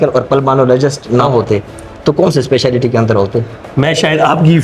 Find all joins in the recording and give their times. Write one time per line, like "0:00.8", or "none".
0:01.2
0:03.6